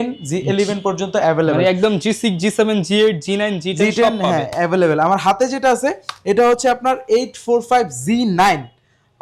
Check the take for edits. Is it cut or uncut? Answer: uncut